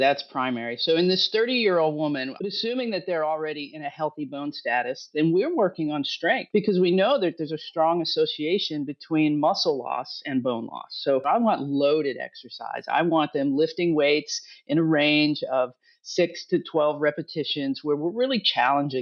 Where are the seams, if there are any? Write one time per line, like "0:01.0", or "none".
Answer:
0:02.3
0:06.4
0:11.2